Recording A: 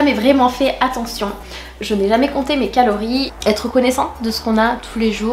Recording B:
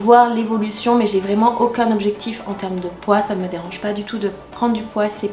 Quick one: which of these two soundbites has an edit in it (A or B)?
A